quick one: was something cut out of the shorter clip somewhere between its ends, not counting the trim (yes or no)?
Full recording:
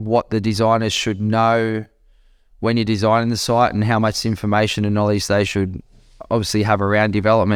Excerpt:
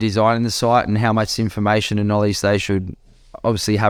no